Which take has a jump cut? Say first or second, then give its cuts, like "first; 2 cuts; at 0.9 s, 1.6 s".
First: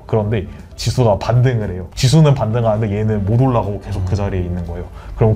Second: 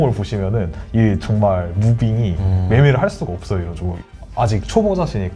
second; 1 cut; at 4.0 s